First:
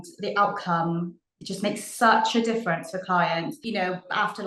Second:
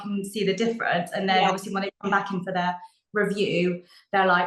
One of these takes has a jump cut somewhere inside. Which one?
first; 1 cut; at 3.6 s

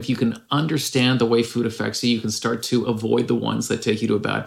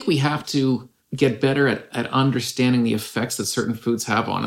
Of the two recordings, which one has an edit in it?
second; 1 cut; at 1.0 s

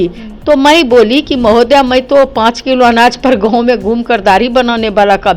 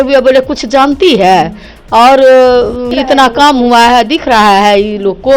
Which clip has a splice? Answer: second; 1 cut; at 2.9 s

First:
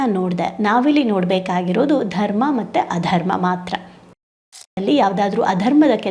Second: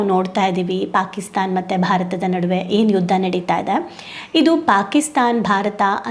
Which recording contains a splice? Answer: first; 1 cut; at 4.2 s

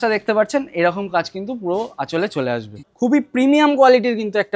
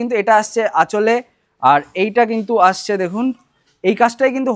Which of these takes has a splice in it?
first; 1 cut; at 2.8 s

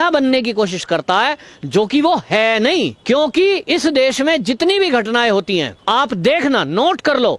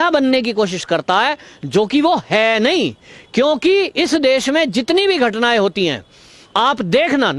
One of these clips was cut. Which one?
first; 2 cuts; at 3.0 s, 5.7 s

